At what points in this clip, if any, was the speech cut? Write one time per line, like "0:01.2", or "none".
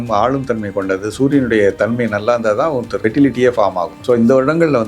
0:02.9
0:03.9